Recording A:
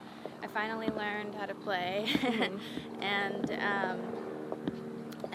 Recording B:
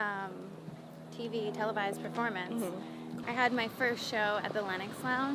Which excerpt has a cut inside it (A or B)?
B